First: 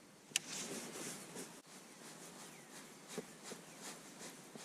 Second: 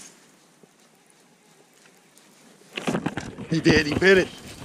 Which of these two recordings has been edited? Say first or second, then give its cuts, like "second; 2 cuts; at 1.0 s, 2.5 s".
first; 1 cut; at 1.7 s